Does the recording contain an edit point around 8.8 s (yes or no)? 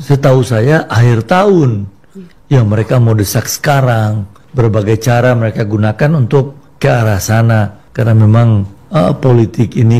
yes